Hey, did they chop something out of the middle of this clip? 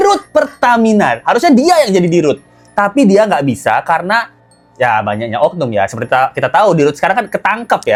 no; 0 cuts

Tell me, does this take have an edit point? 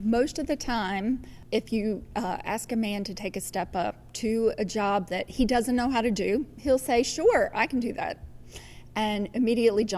yes; 1 cut; at 1.3 s

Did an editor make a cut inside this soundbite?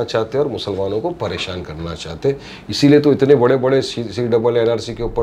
no; 0 cuts

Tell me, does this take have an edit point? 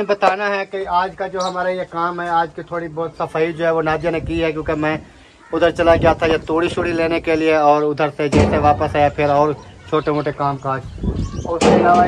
no; 0 cuts

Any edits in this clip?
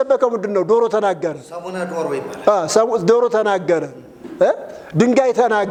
no; 0 cuts

